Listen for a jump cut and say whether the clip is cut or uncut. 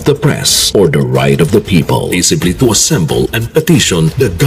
uncut